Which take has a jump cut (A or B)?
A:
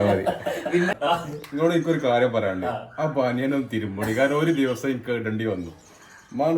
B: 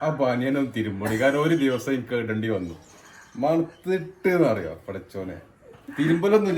A